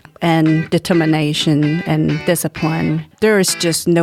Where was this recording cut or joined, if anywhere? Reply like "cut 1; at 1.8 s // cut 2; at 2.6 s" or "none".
cut 1; at 3.1 s